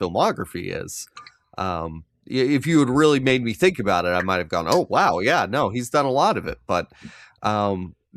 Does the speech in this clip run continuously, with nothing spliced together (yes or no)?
yes